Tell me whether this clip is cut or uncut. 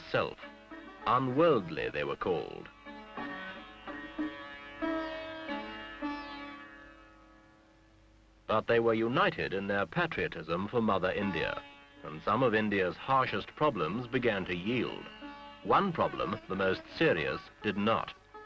cut